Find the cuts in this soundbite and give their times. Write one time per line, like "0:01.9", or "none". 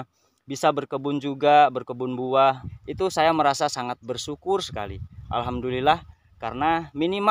0:02.6